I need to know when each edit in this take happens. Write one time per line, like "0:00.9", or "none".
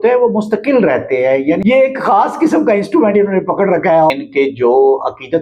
0:01.6
0:04.1